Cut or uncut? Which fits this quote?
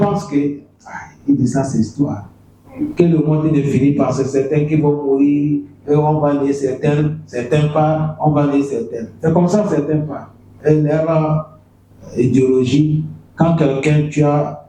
cut